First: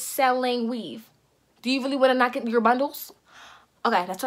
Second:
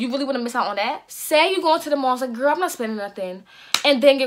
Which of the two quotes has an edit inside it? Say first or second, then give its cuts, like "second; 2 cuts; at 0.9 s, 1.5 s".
second; 1 cut; at 1.1 s